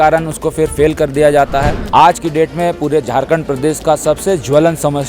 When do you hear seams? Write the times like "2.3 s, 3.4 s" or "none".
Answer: 1.8 s